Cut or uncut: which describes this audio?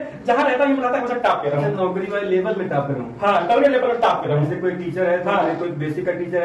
uncut